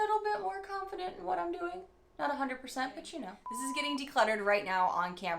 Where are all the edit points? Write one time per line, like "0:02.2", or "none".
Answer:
0:03.4